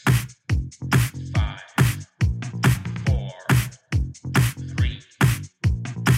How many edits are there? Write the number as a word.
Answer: one